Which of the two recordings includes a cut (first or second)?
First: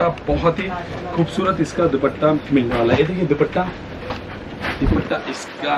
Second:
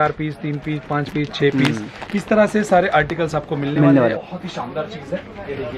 second